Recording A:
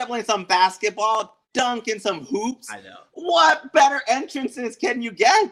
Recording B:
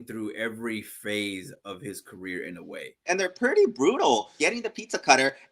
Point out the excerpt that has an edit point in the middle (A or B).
B